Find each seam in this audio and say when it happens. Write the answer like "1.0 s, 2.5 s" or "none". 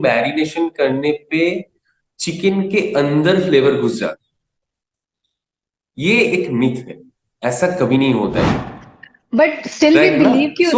8.5 s